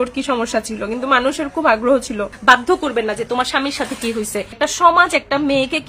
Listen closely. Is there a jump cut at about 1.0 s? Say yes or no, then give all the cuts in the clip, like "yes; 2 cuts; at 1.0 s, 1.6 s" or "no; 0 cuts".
no; 2 cuts; at 2.3 s, 4.5 s